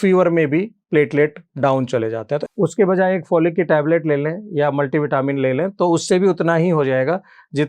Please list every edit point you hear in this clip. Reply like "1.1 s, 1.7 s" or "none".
2.4 s

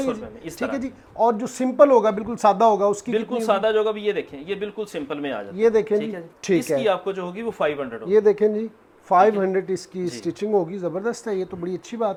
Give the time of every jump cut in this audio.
none

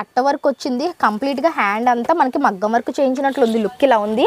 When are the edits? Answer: none

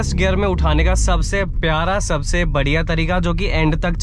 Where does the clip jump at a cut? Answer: none

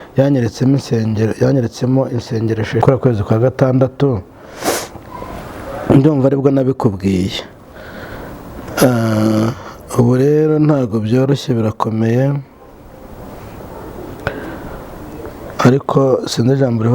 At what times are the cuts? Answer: 2.8 s

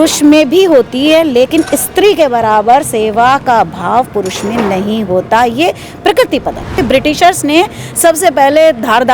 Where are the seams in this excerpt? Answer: 6.8 s

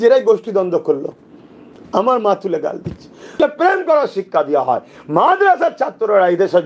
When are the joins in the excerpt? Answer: 3.3 s

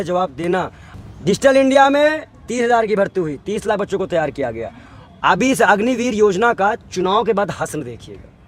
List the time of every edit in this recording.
none

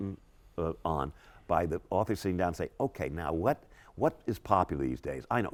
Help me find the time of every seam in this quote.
none

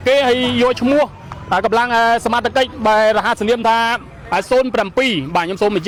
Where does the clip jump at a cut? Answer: none

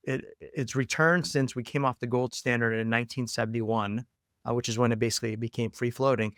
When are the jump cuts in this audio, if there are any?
none

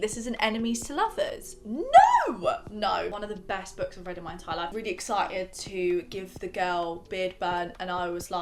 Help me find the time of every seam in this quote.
3.1 s, 4.7 s

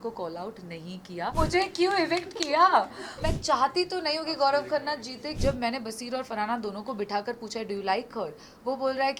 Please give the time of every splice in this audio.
1.3 s, 3.2 s, 5.3 s

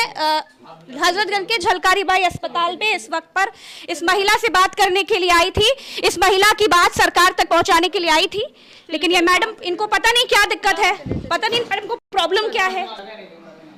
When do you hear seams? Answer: none

